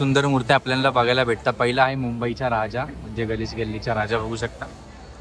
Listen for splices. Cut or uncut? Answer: uncut